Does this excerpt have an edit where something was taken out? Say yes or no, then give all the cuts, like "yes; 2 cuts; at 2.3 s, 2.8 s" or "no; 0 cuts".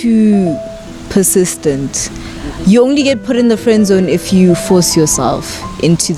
no; 0 cuts